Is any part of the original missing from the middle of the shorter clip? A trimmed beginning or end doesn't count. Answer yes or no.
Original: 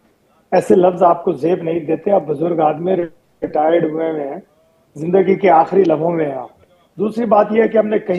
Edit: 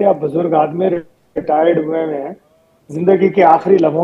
no